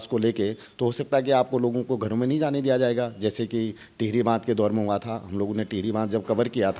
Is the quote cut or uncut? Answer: uncut